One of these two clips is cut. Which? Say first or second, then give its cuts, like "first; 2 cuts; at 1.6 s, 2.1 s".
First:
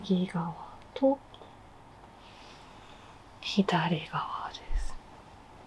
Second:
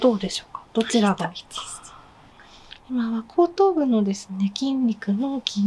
second; 1 cut; at 2.3 s